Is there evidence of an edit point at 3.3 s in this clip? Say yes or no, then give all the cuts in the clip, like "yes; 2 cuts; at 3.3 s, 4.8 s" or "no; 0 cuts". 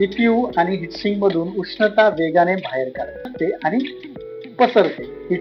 yes; 1 cut; at 3.3 s